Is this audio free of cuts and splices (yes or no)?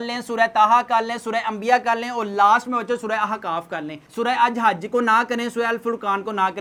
yes